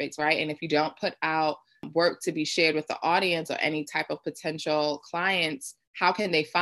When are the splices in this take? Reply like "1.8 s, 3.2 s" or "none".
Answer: 1.8 s